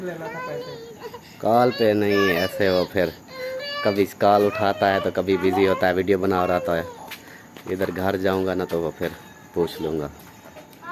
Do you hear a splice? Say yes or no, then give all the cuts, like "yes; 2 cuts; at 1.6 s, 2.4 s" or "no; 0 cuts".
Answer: no; 0 cuts